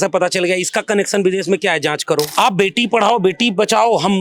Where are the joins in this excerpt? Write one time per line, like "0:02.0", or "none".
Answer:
0:02.3